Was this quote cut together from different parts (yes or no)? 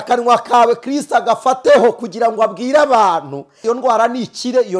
yes